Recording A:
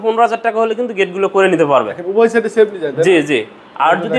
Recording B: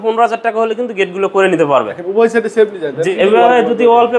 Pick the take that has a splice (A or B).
B